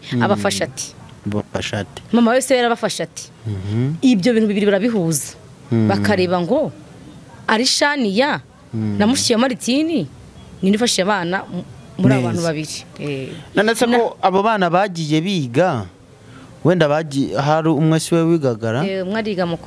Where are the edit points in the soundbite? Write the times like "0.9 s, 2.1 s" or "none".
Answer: none